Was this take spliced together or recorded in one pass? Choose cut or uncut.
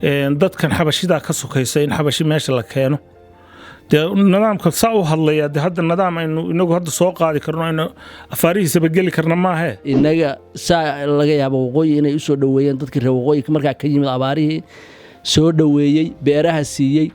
cut